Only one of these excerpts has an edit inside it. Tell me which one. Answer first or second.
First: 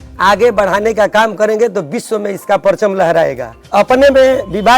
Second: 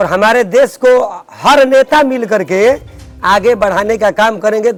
first